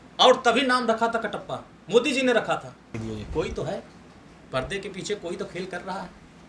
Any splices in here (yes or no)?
yes